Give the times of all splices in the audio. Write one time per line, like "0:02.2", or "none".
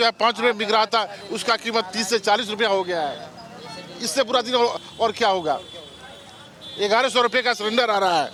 none